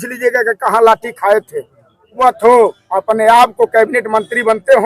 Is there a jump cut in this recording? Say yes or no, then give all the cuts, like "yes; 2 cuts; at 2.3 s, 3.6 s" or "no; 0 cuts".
yes; 1 cut; at 2.2 s